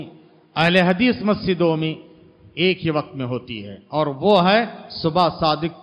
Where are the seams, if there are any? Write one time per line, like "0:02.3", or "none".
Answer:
none